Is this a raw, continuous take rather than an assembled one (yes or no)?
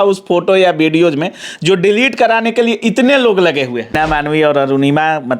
no